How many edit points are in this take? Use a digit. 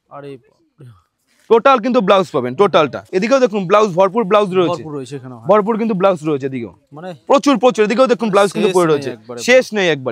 1